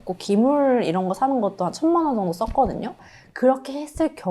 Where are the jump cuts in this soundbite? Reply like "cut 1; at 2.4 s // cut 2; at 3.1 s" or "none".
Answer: cut 1; at 3.0 s